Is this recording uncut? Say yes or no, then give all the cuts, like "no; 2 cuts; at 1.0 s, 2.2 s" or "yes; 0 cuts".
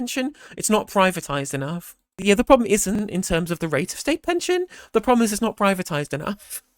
no; 2 cuts; at 2.2 s, 3.0 s